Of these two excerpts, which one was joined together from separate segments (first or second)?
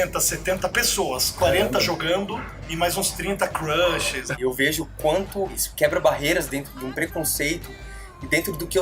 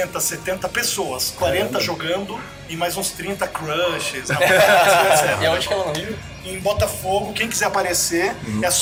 first